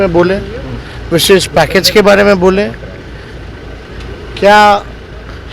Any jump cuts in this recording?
no; 0 cuts

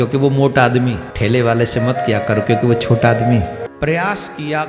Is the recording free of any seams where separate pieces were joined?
no; 2 cuts; at 1.1 s, 3.6 s

